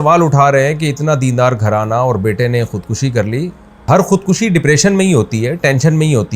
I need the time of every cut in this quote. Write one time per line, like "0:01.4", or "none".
0:03.9